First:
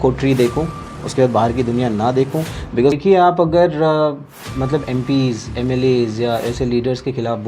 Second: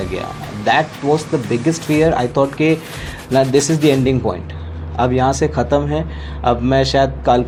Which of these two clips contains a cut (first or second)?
first